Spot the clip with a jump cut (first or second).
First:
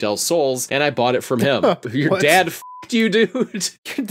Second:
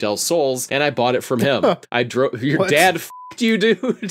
first